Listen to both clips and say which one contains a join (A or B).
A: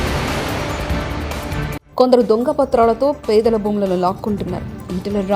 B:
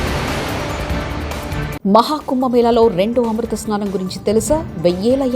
B